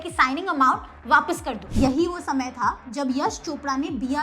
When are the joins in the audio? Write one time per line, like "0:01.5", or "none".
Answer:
0:01.6